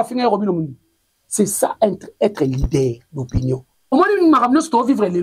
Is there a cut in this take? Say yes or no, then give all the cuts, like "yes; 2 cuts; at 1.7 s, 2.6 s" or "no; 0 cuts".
yes; 1 cut; at 3.7 s